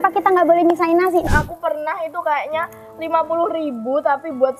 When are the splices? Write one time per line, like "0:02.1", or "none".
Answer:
0:01.3